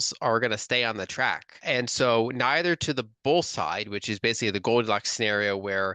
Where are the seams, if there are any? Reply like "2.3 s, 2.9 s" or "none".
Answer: 1.6 s

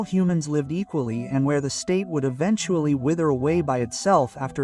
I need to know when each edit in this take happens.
none

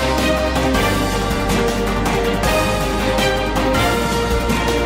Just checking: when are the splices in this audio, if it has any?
none

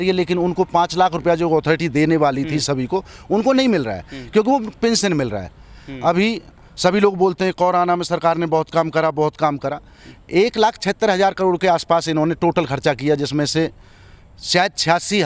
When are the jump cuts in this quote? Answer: none

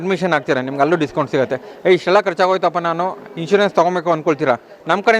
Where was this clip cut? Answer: none

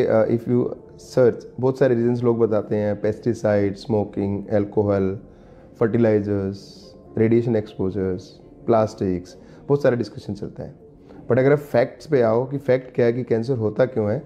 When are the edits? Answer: none

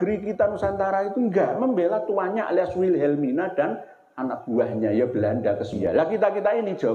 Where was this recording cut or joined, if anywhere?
5.7 s

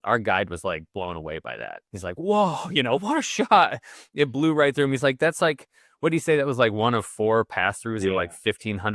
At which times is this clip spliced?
1.8 s

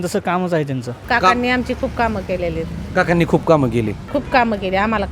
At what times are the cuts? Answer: 1.0 s

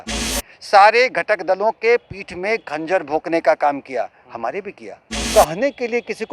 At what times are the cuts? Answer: 5.2 s

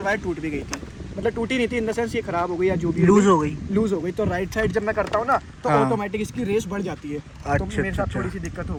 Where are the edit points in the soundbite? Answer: none

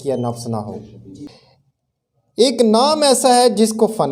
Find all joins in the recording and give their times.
1.3 s

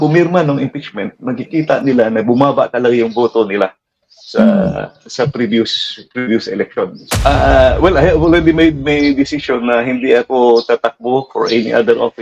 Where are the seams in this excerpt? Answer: 7.0 s

